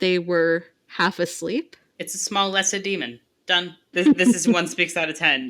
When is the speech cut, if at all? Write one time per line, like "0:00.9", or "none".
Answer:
0:03.9